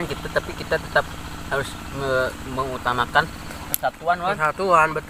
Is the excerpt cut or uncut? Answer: uncut